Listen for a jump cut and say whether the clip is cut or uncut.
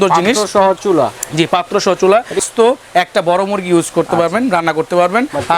cut